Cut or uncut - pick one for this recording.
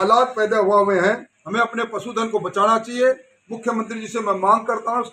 cut